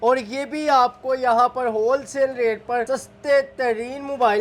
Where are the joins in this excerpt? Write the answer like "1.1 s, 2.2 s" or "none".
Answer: 2.9 s